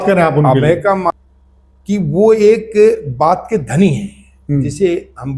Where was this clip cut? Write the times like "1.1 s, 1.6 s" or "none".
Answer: 1.1 s